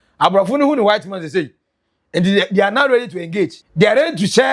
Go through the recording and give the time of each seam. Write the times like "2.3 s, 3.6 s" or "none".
3.6 s

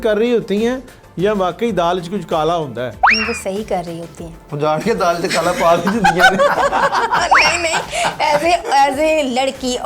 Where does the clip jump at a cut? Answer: 3.0 s

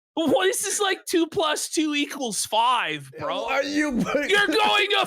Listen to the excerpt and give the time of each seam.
3.4 s

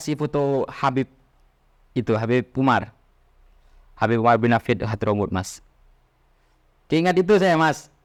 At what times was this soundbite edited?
none

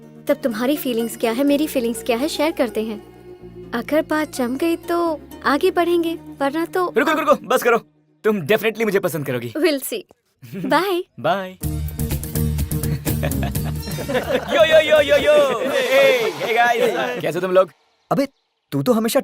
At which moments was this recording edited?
11.6 s, 13.8 s

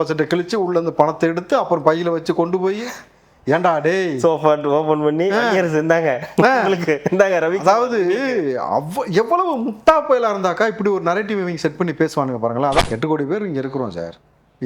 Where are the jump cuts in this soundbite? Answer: 12.8 s

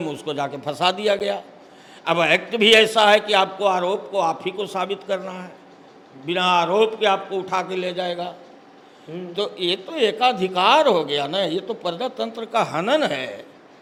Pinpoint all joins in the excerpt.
none

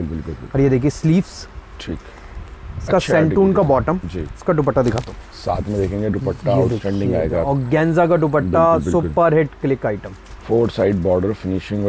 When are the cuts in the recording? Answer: none

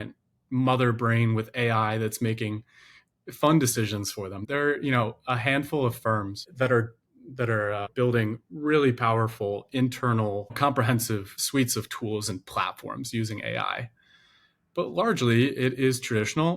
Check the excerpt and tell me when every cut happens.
4.4 s, 6.5 s, 7.9 s, 10.6 s, 11.4 s

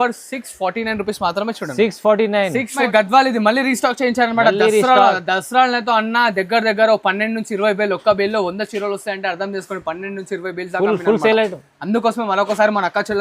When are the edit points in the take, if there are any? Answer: 2.8 s

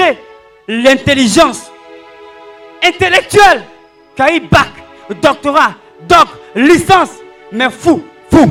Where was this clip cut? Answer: none

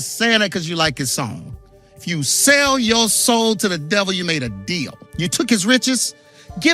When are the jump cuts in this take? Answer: 5.0 s

